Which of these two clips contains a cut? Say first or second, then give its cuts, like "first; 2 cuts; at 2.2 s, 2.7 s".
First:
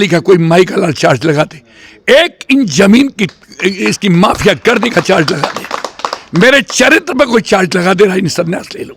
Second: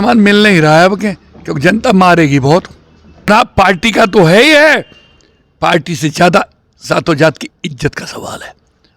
second; 1 cut; at 3.3 s